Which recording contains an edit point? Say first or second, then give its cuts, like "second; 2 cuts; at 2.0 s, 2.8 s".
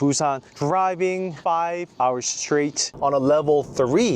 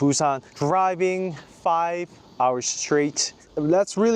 first; 2 cuts; at 1.6 s, 2.9 s